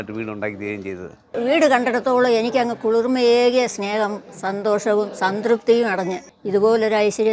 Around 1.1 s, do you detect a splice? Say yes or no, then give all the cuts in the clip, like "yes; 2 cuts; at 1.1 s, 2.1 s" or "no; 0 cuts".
yes; 1 cut; at 1.1 s